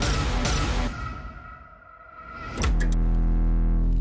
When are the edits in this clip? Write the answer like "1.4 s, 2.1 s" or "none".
2.6 s